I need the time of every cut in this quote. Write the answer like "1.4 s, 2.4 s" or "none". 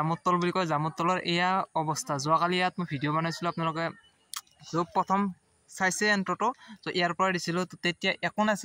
none

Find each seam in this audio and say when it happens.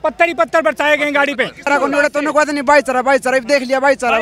1.7 s

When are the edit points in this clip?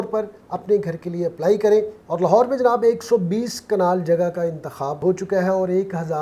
2.0 s

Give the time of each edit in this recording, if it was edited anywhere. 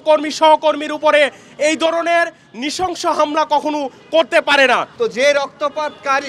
4.9 s

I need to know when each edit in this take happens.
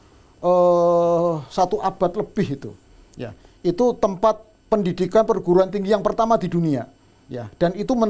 none

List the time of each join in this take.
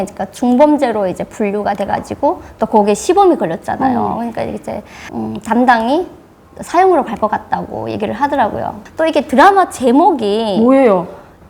8.8 s

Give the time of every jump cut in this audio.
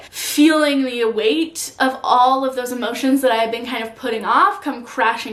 none

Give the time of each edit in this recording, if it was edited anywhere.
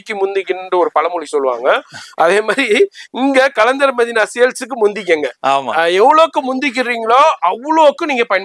none

